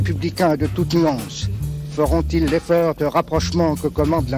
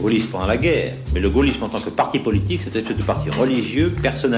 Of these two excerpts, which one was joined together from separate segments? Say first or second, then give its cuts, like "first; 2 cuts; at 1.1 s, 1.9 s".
second; 1 cut; at 1.1 s